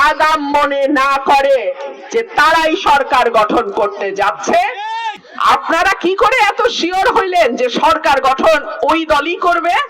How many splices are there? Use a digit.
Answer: 1